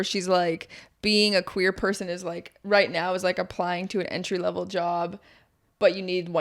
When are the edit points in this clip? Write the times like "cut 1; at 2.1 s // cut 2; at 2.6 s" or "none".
none